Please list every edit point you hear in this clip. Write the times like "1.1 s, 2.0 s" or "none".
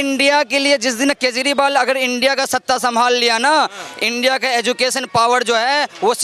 none